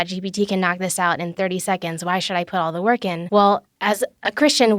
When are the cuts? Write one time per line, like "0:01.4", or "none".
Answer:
0:03.2